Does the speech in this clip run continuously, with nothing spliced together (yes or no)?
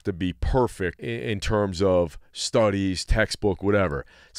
no